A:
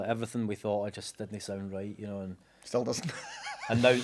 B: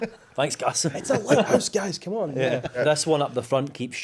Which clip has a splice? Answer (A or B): B